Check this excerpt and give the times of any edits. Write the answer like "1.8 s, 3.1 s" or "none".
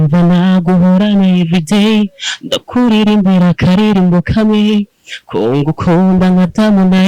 none

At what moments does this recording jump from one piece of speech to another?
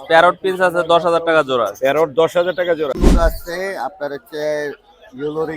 3.0 s

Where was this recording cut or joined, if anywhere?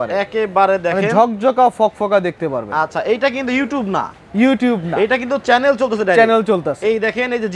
none

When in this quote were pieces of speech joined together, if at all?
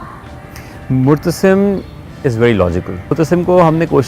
3.1 s

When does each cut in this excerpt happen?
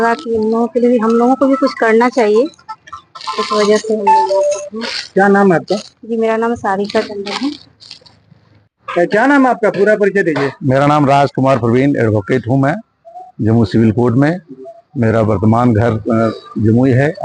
none

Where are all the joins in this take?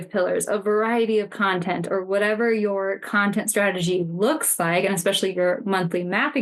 none

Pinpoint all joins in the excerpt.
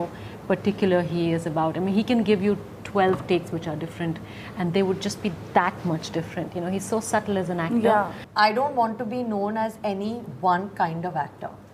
8.3 s

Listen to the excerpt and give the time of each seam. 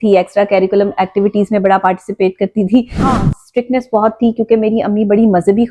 3.1 s

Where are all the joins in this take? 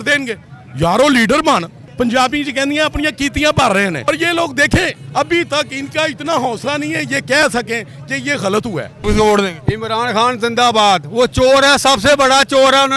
1.8 s, 4.0 s, 9.0 s

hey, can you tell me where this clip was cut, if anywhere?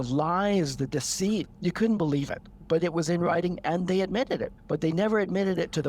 1.5 s, 4.5 s

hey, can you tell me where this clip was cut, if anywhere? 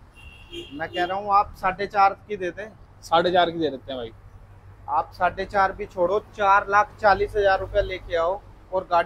none

